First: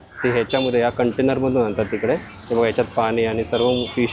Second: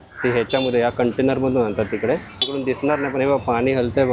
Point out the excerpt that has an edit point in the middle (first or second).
second